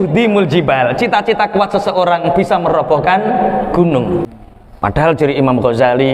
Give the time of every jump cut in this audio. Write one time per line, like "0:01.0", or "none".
0:04.3